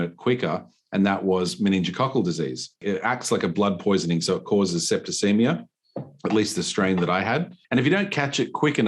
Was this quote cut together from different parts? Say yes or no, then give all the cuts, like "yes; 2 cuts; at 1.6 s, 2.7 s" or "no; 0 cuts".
yes; 2 cuts; at 2.8 s, 7.5 s